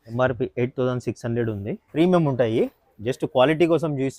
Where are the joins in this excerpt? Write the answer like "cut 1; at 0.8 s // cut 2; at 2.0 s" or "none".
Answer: cut 1; at 1.8 s